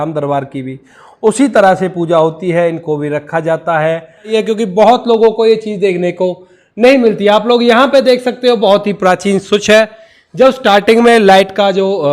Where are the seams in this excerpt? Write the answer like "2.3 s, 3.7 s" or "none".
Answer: 4.3 s